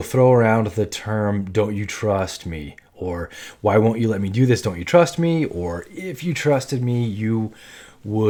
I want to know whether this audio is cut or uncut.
uncut